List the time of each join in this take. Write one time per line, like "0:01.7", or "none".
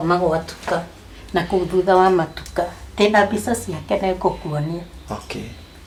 none

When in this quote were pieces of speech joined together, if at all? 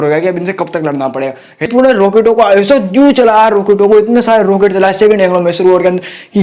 0:01.7

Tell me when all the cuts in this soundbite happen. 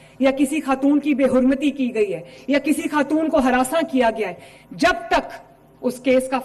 none

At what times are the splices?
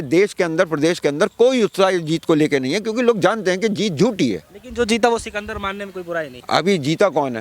0:04.6
0:06.4

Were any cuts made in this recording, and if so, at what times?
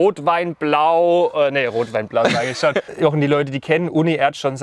0:02.9

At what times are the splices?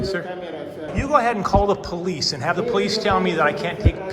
0:00.9

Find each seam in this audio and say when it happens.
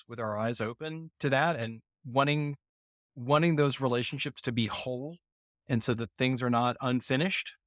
0:01.1

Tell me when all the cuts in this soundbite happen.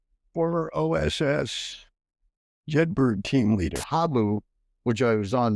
0:03.8

